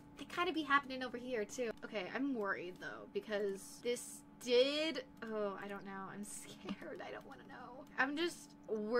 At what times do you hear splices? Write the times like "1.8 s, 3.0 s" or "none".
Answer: 1.8 s